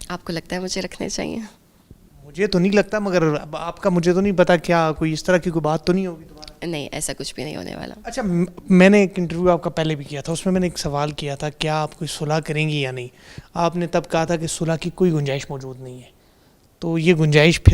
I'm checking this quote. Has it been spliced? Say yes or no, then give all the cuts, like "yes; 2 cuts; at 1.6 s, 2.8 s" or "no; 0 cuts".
no; 0 cuts